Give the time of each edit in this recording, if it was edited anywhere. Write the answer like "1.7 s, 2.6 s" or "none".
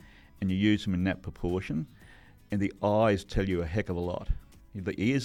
none